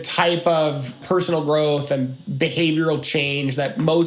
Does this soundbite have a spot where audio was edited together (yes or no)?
yes